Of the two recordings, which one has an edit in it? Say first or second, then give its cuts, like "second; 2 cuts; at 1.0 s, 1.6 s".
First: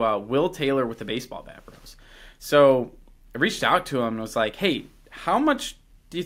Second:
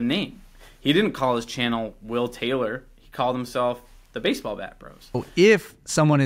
second; 1 cut; at 5.3 s